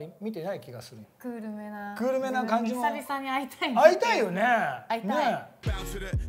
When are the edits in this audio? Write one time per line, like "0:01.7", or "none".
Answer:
0:01.0